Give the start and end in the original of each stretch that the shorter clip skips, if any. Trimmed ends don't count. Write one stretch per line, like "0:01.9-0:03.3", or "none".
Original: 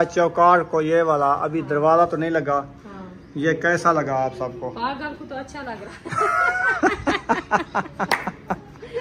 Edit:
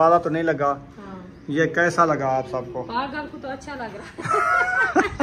none